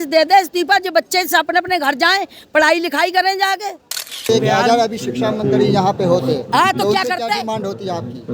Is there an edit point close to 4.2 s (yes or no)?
yes